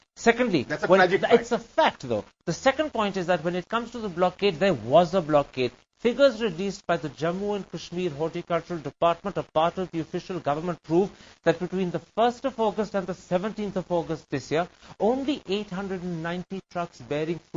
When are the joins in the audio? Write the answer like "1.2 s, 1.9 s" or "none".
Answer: none